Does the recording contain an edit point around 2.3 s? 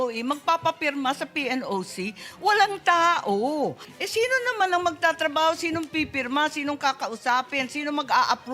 no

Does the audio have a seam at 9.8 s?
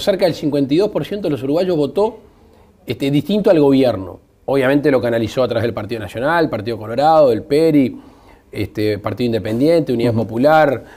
yes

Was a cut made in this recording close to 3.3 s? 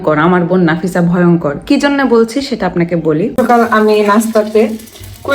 yes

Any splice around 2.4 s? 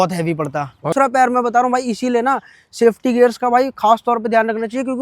no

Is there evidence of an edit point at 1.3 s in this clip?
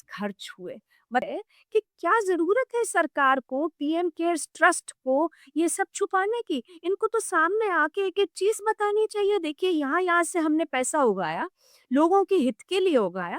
yes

